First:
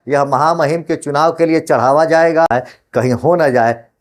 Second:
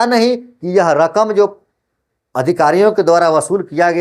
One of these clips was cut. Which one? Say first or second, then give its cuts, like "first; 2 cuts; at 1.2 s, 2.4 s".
first; 1 cut; at 2.5 s